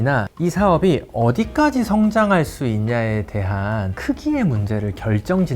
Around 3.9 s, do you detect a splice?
yes; 1 cut; at 3.9 s

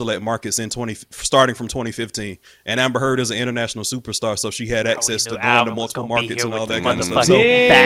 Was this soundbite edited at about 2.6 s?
no; 0 cuts

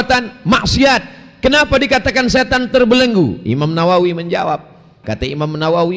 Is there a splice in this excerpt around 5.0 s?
yes; 1 cut; at 5.0 s

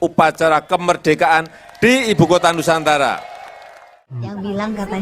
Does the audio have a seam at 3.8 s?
yes; 1 cut; at 3.8 s

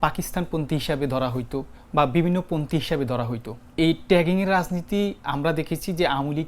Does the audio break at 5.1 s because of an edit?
no; 2 cuts; at 1.8 s, 3.6 s

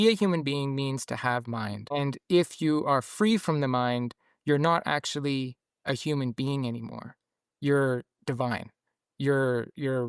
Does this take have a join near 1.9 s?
yes; 1 cut; at 1.9 s

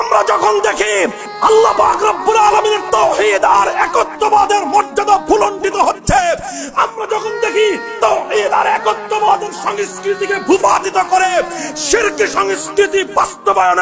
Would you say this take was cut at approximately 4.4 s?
no; 1 cut; at 1.2 s

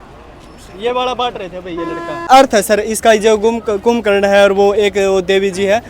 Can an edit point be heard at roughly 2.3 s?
yes; 1 cut; at 2.3 s

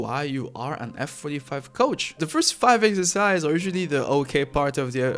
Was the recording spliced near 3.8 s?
no; 1 cut; at 2.2 s

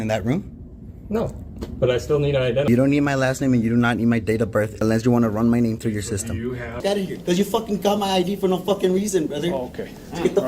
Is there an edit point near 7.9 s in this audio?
no; 3 cuts; at 2.7 s, 4.8 s, 6.7 s

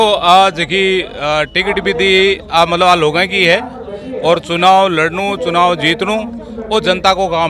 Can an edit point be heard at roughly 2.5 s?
no; 0 cuts

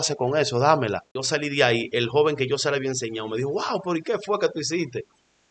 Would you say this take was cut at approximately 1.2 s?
yes; 1 cut; at 1.2 s

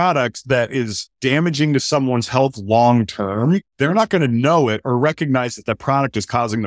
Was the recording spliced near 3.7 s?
yes; 2 cuts; at 1.0 s, 3.7 s

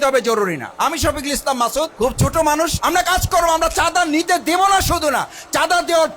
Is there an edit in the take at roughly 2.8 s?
yes; 2 cuts; at 1.9 s, 2.8 s

